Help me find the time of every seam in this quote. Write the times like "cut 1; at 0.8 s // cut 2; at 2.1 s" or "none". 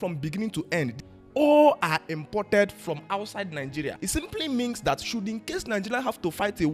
cut 1; at 1.0 s // cut 2; at 4.0 s